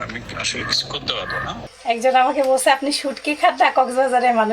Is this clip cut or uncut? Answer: cut